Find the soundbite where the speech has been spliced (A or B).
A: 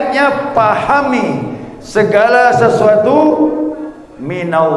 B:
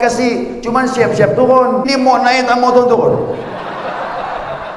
B